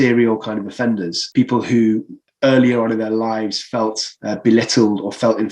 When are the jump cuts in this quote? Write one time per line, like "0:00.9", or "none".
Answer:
0:01.2
0:02.2
0:04.1